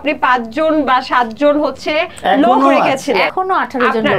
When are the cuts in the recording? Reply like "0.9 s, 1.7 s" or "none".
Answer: 3.3 s

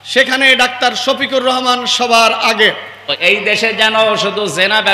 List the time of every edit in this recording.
3.1 s

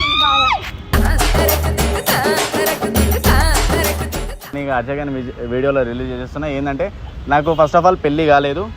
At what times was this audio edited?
4.5 s

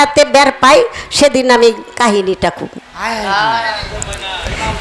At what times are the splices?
none

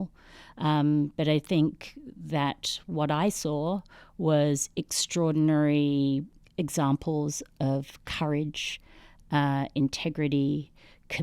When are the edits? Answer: 6.4 s

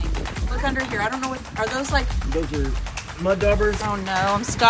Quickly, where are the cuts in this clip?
3.8 s

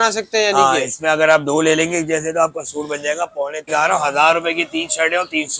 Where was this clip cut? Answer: 3.7 s

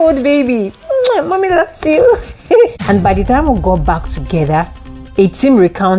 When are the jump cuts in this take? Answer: 2.8 s

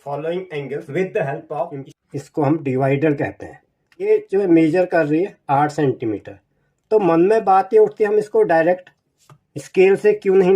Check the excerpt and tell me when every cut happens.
1.9 s, 4.1 s

